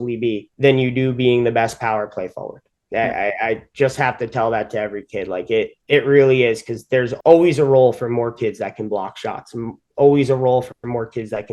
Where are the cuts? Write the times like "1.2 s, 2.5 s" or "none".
7.1 s